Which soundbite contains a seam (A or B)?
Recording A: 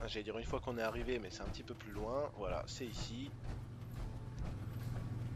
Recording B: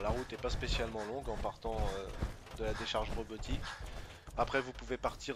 A